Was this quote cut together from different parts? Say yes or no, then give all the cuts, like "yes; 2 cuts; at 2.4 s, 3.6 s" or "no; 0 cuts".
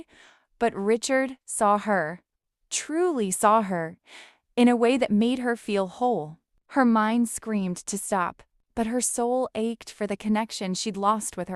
no; 0 cuts